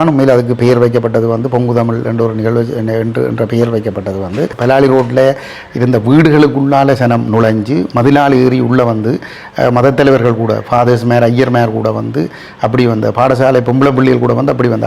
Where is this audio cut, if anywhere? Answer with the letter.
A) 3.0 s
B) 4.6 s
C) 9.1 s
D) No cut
B